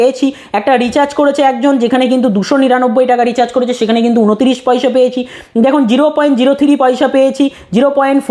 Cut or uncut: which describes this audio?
uncut